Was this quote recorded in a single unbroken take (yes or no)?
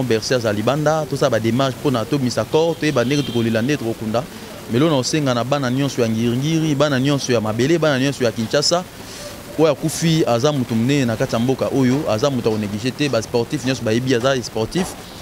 yes